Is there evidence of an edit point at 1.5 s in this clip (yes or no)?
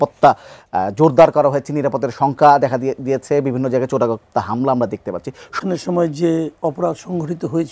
no